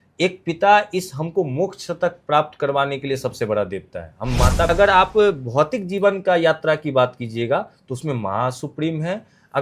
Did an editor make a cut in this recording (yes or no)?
yes